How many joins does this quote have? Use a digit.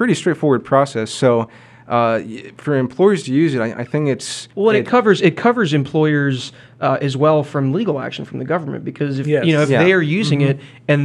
0